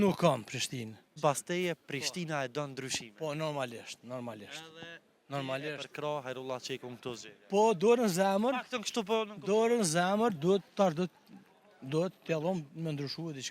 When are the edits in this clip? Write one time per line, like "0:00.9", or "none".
0:01.1